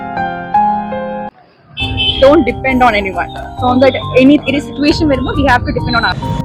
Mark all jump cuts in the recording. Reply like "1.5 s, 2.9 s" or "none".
1.3 s